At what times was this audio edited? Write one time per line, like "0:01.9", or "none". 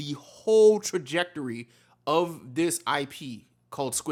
none